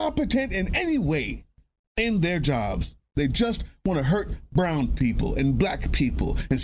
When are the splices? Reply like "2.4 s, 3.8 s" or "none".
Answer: none